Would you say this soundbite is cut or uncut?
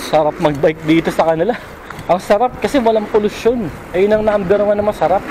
uncut